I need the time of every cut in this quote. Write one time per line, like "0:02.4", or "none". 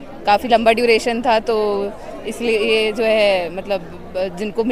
none